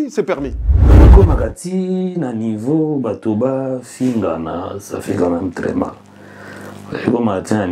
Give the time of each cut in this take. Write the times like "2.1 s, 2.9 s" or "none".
1.0 s